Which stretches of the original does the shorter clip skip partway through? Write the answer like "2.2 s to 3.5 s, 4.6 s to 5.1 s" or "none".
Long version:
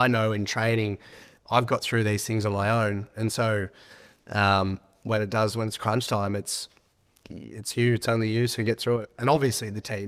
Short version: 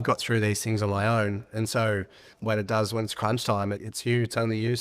3.9 s to 4.9 s, 6.5 s to 7.6 s